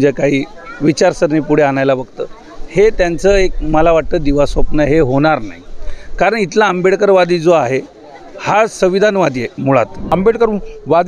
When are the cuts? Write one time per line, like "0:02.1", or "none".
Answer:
0:10.0